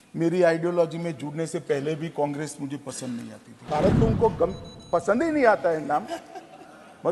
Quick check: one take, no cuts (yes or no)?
no